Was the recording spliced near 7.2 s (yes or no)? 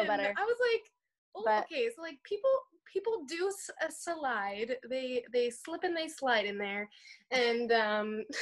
no